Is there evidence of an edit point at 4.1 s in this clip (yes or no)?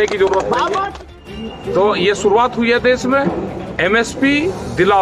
no